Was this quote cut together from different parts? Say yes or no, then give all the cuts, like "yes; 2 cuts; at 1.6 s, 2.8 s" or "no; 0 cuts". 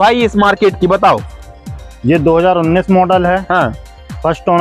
no; 0 cuts